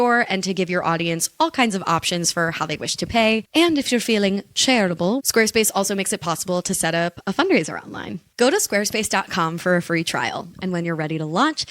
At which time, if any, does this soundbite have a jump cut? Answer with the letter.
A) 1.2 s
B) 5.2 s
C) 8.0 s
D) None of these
B